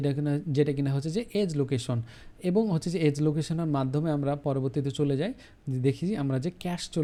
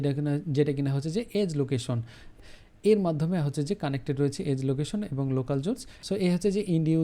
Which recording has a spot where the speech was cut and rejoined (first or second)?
second